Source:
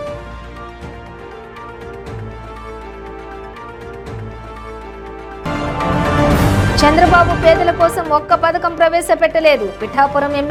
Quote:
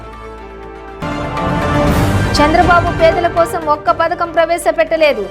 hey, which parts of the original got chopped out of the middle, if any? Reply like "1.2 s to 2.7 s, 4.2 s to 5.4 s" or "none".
3.3 s to 5.3 s